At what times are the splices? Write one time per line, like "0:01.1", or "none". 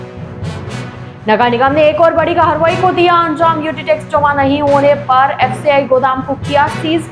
none